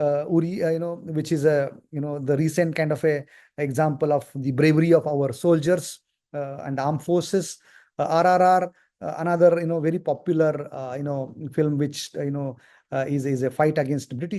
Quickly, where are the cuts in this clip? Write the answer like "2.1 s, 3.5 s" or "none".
none